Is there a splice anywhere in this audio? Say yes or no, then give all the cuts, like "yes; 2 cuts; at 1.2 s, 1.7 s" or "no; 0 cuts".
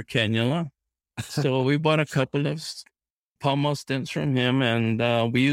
yes; 1 cut; at 3.4 s